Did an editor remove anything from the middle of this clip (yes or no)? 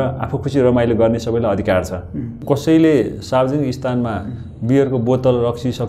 yes